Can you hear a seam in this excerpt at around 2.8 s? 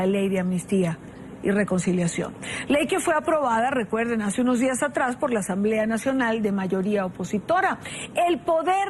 no; 0 cuts

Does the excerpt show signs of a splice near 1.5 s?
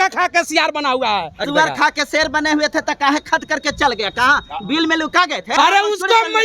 yes; 2 cuts; at 1.5 s, 5.4 s

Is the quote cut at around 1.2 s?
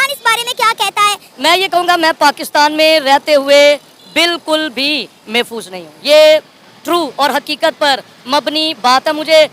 yes; 1 cut; at 1.2 s

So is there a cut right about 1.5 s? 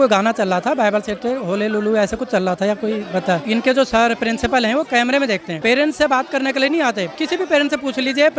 no; 3 cuts; at 3.4 s, 5.5 s, 7.1 s

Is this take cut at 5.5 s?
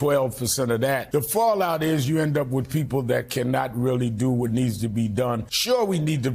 yes; 2 cuts; at 1.0 s, 5.5 s

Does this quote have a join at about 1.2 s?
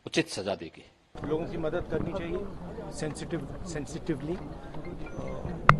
yes; 1 cut; at 1.2 s

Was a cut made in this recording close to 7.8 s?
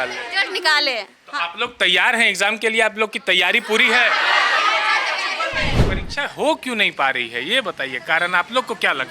no; 1 cut; at 5.8 s

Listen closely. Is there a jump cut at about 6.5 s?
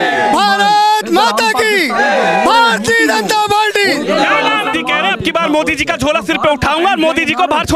no; 1 cut; at 4.7 s

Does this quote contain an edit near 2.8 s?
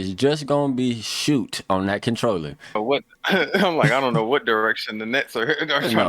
yes; 1 cut; at 2.8 s

